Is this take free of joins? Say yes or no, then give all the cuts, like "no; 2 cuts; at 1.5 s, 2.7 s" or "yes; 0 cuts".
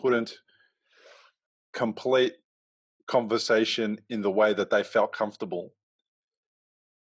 yes; 0 cuts